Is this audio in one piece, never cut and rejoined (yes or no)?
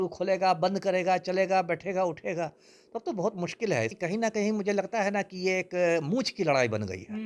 no